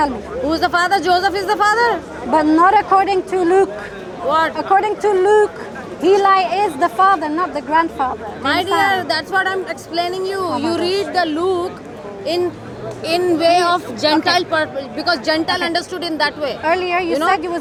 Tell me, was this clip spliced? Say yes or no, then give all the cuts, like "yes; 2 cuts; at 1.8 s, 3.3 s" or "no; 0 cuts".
no; 0 cuts